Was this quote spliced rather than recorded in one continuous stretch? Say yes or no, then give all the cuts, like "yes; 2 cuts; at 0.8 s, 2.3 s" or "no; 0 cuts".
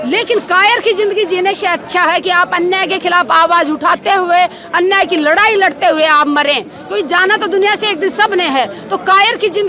no; 0 cuts